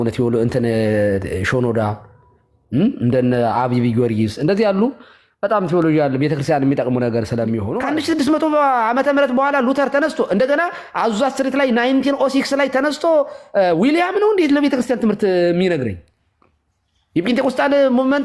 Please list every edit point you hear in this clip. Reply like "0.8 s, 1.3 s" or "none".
7.8 s